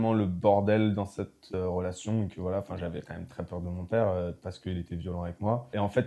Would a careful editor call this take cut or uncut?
uncut